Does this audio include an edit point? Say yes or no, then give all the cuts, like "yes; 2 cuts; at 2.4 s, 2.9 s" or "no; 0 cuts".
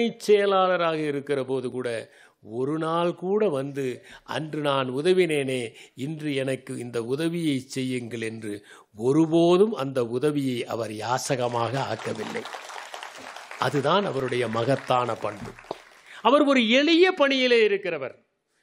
no; 0 cuts